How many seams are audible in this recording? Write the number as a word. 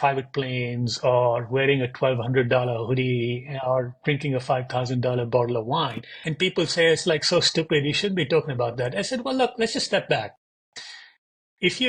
zero